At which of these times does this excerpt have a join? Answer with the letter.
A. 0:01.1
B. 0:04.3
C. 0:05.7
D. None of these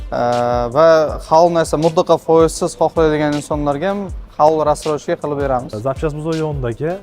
C